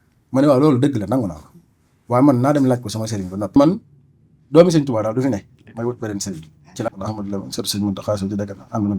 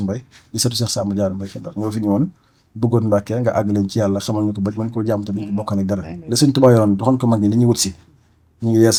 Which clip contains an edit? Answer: first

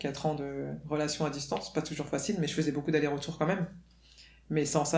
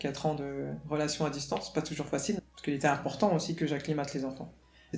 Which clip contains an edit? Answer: second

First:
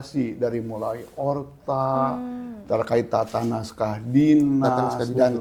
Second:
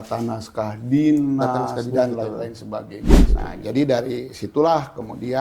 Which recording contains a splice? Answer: second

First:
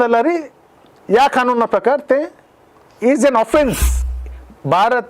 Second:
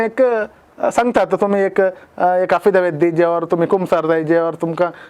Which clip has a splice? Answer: first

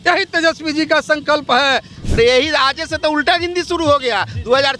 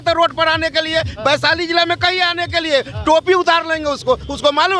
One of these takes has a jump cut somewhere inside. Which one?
first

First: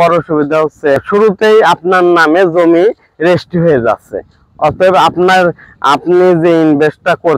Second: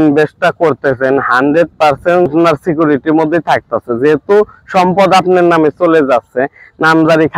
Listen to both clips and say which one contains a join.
first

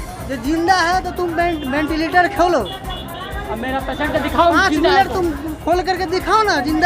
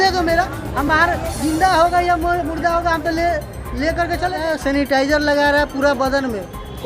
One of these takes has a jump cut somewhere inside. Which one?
second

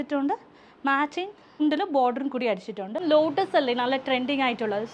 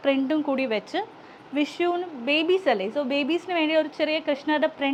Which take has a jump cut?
first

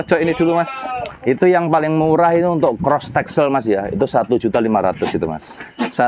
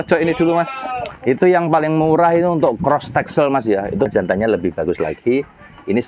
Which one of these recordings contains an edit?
second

